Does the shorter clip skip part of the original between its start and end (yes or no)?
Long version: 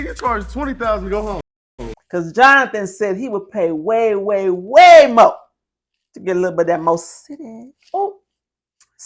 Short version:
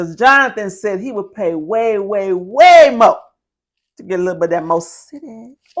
no